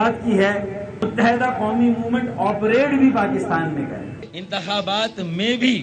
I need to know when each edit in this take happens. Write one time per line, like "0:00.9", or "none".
0:04.3